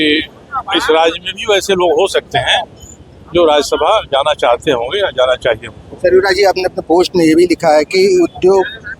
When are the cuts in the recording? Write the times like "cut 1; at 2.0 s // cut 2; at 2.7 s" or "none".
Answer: none